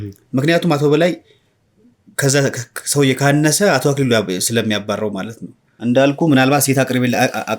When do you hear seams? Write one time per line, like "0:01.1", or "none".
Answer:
0:06.0